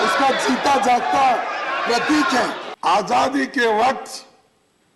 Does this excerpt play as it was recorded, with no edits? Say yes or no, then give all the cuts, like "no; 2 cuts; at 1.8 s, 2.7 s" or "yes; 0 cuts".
no; 1 cut; at 2.6 s